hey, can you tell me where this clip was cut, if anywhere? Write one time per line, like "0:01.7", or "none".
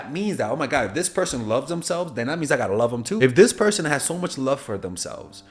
0:03.2